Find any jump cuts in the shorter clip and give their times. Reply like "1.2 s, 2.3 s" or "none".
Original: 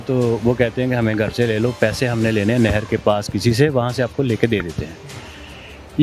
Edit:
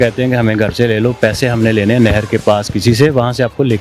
none